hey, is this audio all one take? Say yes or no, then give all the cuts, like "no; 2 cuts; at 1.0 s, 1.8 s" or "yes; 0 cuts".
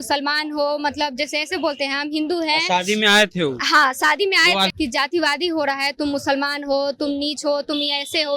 no; 1 cut; at 4.7 s